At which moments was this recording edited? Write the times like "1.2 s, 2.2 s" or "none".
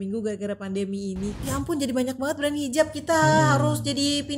1.3 s